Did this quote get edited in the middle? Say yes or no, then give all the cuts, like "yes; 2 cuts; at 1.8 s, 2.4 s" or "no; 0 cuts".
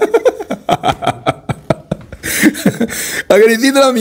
no; 0 cuts